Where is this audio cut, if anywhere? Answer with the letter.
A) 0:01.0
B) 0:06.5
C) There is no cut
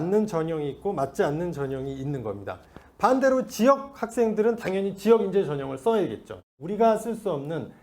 B